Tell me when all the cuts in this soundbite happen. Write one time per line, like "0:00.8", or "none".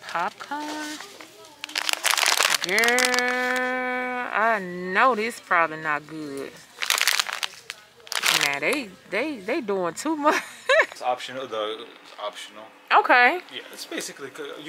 0:10.9